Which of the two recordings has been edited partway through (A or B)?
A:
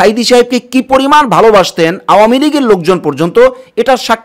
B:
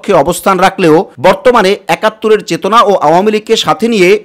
B